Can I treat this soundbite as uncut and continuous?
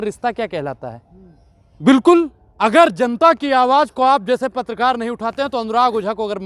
no; 1 cut; at 1.6 s

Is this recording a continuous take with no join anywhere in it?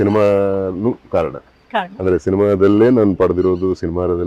yes; 0 cuts

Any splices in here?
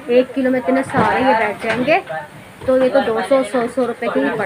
no; 0 cuts

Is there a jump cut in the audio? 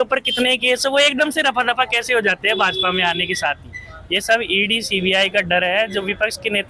no; 0 cuts

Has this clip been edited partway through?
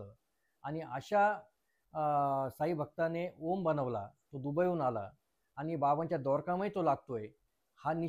no; 0 cuts

